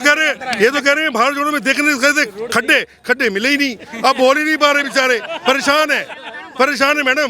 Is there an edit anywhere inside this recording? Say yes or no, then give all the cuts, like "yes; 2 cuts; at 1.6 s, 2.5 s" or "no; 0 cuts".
no; 0 cuts